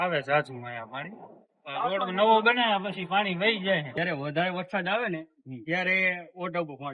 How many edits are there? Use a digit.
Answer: 1